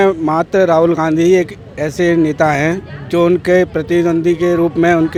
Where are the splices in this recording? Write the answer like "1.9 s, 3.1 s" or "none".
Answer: none